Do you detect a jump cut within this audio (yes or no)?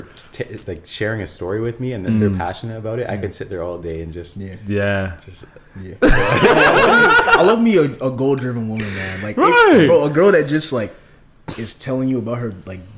no